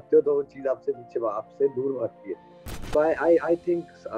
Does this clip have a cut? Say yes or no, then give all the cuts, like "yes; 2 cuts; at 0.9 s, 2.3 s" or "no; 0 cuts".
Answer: yes; 1 cut; at 2.7 s